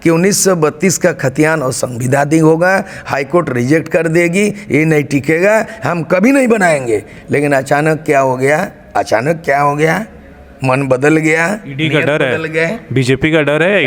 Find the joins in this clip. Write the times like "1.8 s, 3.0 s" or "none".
none